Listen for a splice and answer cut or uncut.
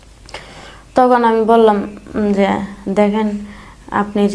uncut